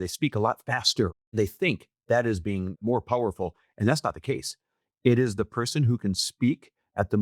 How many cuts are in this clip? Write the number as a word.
two